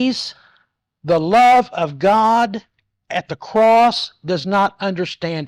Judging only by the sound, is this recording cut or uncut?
uncut